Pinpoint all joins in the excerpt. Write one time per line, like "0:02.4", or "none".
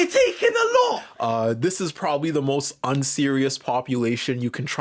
0:01.1